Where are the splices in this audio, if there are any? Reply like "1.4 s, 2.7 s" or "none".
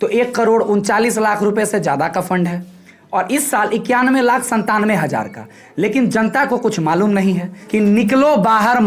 7.5 s